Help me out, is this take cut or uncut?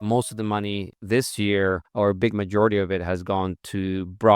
cut